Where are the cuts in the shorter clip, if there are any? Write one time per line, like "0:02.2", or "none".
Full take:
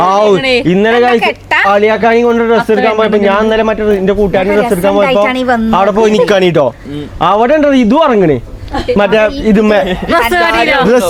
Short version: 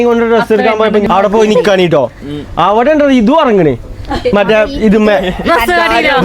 0:01.0